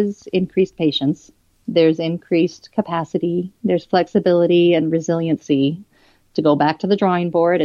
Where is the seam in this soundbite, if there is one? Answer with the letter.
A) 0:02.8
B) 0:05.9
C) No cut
C